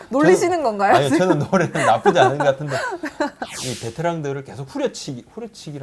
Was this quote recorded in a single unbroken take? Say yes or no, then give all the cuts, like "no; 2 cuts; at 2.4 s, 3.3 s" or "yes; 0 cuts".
no; 1 cut; at 3.4 s